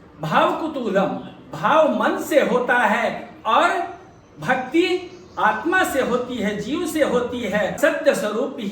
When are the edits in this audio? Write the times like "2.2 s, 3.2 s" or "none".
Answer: 7.8 s